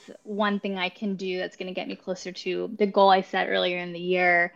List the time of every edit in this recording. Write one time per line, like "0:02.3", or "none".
none